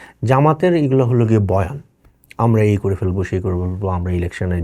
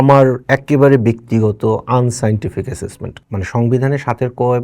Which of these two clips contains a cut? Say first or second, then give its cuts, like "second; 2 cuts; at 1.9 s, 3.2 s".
second; 1 cut; at 3.0 s